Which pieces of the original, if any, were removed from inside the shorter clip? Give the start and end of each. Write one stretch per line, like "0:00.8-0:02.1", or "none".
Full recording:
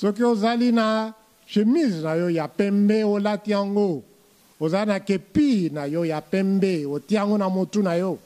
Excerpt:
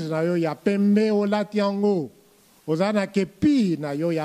none